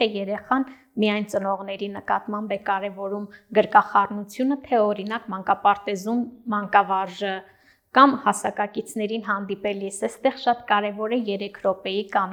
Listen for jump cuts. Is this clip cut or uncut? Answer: uncut